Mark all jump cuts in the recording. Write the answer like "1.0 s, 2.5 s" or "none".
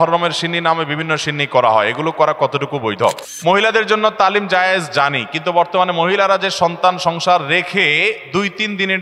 3.3 s